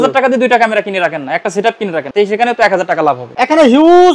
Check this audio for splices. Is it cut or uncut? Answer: cut